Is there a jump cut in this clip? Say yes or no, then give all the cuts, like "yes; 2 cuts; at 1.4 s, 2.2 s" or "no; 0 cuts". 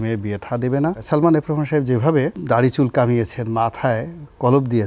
yes; 2 cuts; at 1.0 s, 2.4 s